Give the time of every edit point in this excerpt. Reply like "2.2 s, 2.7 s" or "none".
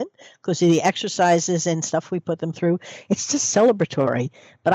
none